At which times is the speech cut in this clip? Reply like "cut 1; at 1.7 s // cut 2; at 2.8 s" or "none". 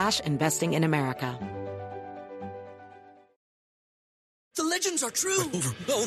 cut 1; at 1.3 s